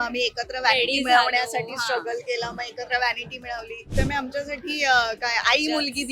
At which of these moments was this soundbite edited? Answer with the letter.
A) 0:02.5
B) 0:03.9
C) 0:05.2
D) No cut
B